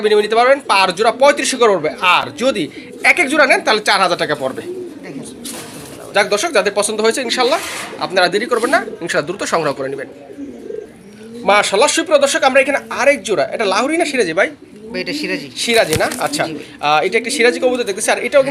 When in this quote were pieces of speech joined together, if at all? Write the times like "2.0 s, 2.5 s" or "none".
none